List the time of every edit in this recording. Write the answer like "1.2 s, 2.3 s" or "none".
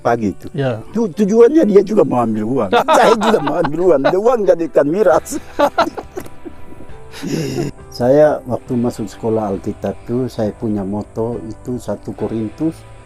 7.7 s